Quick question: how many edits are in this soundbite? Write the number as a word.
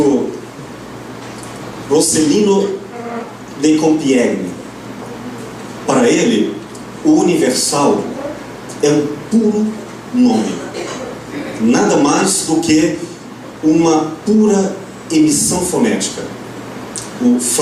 one